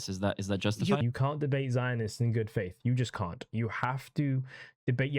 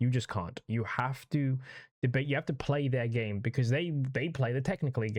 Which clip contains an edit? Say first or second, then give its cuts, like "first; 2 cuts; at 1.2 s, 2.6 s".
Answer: first; 1 cut; at 1.0 s